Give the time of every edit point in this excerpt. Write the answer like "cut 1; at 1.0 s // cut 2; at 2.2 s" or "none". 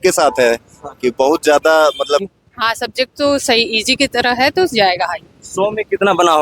cut 1; at 2.2 s

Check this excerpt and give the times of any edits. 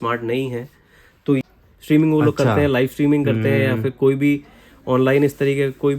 cut 1; at 1.4 s

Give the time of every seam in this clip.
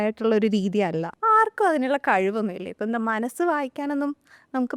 cut 1; at 1.1 s

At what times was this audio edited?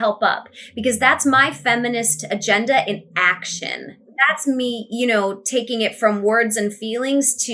cut 1; at 4.0 s

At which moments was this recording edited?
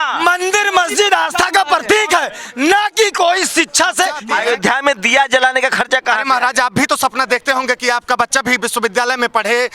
cut 1; at 4.2 s

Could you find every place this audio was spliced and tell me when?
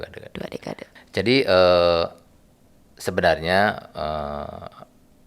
cut 1; at 0.9 s

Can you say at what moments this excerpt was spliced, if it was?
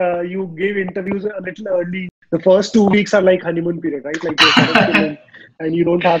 cut 1; at 2.1 s

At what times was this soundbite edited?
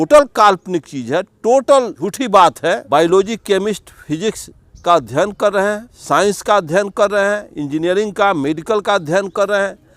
cut 1; at 2.0 s // cut 2; at 2.8 s // cut 3; at 5.9 s

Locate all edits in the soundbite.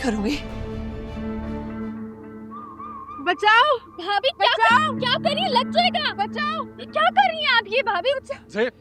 cut 1; at 1.2 s

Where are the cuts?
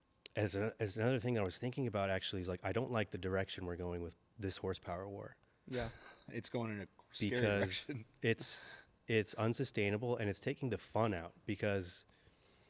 none

